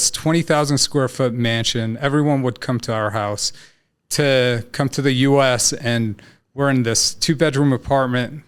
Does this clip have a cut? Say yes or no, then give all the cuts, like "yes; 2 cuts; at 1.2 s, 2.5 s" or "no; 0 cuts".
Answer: no; 0 cuts